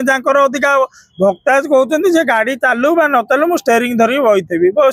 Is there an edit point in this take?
no; 0 cuts

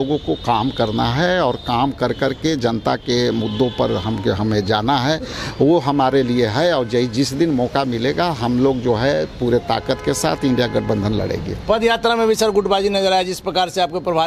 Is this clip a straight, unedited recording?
yes; 0 cuts

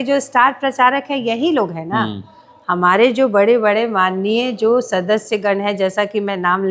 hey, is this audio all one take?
yes; 0 cuts

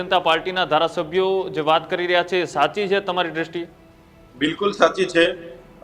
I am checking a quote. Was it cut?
no; 0 cuts

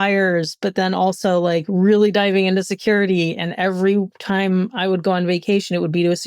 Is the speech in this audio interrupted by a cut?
no; 0 cuts

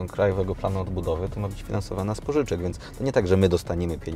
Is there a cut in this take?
no; 0 cuts

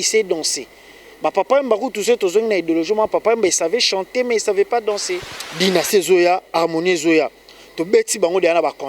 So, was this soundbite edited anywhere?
yes; 1 cut; at 5.4 s

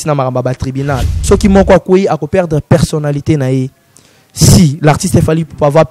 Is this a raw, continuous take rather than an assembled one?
no; 1 cut; at 1.1 s

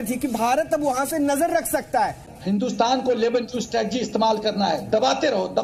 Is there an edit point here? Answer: yes; 1 cut; at 2.3 s

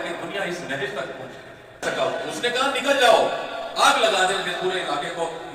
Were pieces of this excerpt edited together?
yes; 1 cut; at 1.8 s

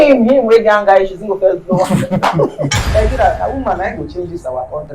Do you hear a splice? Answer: yes; 1 cut; at 2.8 s

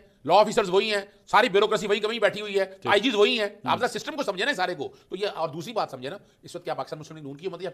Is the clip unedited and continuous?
yes; 0 cuts

